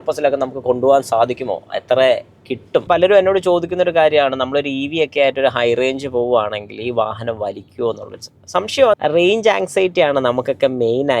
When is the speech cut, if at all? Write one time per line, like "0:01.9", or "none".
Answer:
0:02.9
0:09.0